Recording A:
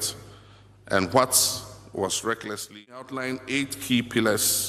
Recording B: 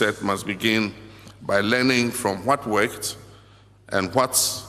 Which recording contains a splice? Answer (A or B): A